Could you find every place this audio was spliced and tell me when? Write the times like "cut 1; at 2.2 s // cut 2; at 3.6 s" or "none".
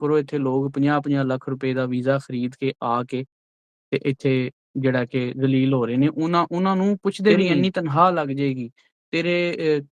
cut 1; at 7.5 s